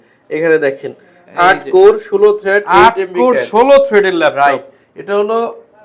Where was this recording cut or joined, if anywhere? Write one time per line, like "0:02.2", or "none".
none